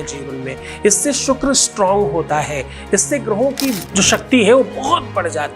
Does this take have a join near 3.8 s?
yes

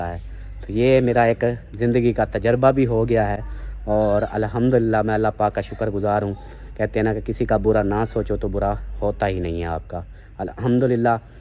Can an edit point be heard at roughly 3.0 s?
no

